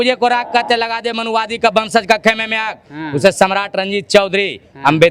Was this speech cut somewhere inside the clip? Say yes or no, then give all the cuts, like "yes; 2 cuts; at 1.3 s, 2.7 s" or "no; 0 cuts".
no; 0 cuts